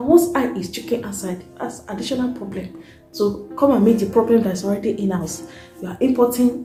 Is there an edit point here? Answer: no; 0 cuts

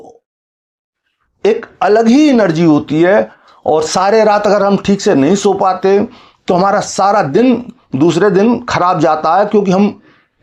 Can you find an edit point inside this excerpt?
no; 0 cuts

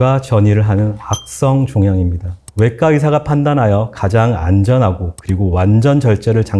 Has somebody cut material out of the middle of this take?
yes; 1 cut; at 2.4 s

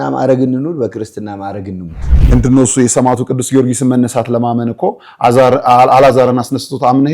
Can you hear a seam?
yes; 1 cut; at 2.2 s

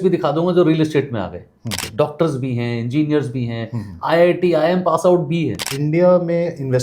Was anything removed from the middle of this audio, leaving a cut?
yes; 2 cuts; at 1.8 s, 5.7 s

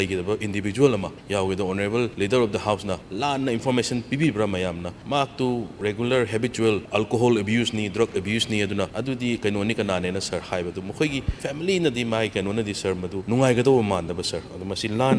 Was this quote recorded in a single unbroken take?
no; 9 cuts; at 1.2 s, 2.1 s, 3.1 s, 4.9 s, 5.7 s, 6.9 s, 8.9 s, 11.3 s, 13.2 s

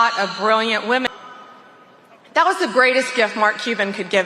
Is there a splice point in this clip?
yes; 1 cut; at 1.1 s

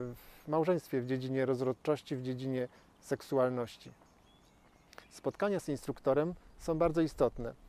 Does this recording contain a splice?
yes; 1 cut; at 3.8 s

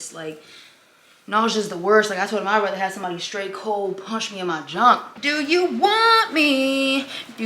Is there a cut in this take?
yes; 1 cut; at 5.1 s

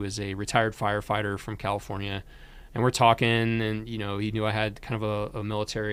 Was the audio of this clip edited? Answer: no; 0 cuts

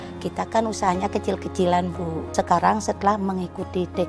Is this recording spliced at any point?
yes; 1 cut; at 2.3 s

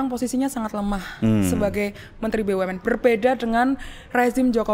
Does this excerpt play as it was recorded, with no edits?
yes; 0 cuts

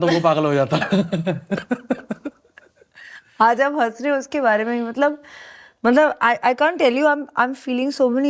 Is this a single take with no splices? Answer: yes; 0 cuts

